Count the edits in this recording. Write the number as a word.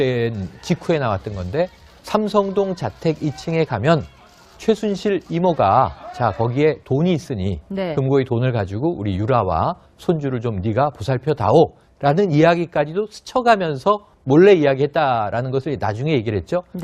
one